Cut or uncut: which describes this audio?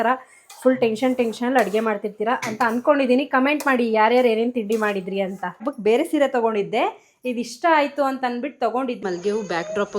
cut